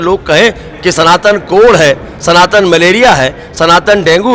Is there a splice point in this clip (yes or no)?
no